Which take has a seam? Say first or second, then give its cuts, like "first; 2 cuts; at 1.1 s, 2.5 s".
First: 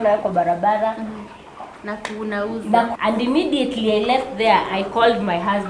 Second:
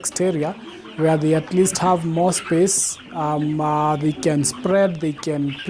first; 1 cut; at 2.9 s